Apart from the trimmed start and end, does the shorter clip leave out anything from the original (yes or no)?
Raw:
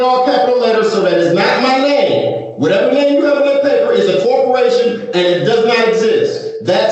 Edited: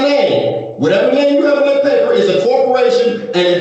no